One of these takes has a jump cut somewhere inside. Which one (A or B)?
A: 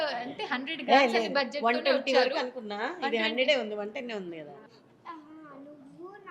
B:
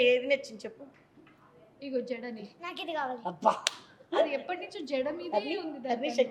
A